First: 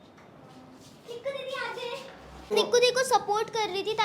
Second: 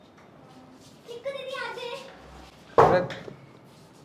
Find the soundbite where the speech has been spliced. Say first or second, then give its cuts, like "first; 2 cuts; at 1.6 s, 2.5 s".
first; 1 cut; at 2.5 s